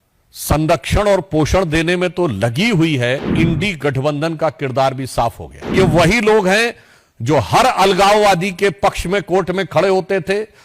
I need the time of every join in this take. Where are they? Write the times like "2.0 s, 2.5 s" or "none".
3.3 s, 5.7 s